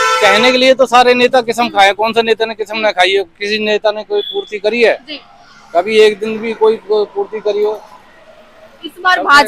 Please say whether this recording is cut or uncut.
uncut